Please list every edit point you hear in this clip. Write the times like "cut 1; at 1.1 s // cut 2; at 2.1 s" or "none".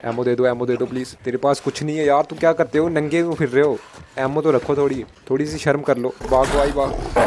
cut 1; at 1.1 s // cut 2; at 5.1 s // cut 3; at 6.2 s